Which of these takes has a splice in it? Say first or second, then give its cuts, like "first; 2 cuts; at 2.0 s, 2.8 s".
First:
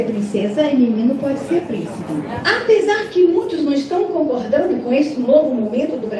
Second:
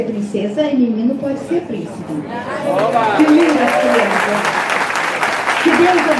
first; 1 cut; at 2.3 s